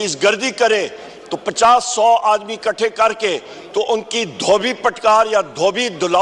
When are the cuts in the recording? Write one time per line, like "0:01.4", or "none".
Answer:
none

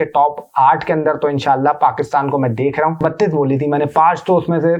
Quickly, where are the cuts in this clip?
0:03.0

